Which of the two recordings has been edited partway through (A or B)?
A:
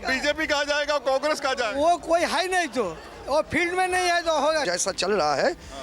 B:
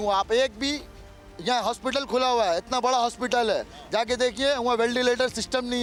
A